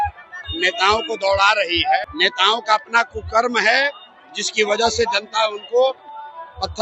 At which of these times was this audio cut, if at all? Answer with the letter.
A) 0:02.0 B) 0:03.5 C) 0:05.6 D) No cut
A